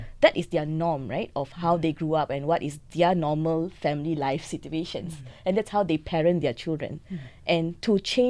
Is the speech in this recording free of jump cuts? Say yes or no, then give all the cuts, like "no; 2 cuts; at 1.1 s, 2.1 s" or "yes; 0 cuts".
yes; 0 cuts